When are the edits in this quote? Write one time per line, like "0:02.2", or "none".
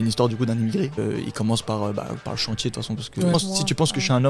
0:01.0
0:03.3